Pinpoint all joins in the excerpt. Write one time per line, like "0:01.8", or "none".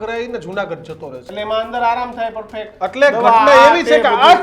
0:01.2